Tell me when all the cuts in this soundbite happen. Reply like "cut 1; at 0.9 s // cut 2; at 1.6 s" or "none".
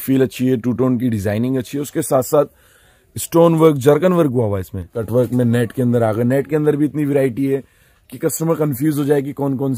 cut 1; at 5.0 s

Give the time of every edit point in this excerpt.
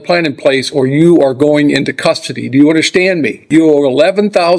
cut 1; at 3.4 s

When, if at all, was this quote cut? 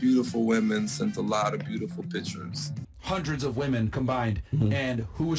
cut 1; at 2.7 s

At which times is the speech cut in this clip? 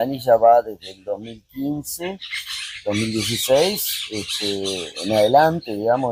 none

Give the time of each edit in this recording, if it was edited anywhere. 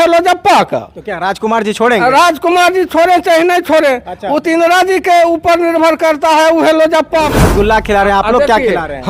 cut 1; at 7.3 s

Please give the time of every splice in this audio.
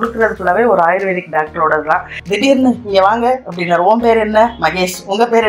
cut 1; at 2.1 s

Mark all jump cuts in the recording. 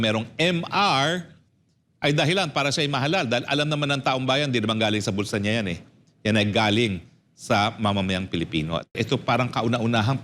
cut 1; at 9.0 s

